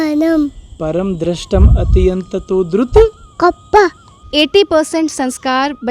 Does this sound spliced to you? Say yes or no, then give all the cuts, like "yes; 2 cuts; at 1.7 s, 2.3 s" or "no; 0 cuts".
yes; 1 cut; at 4.2 s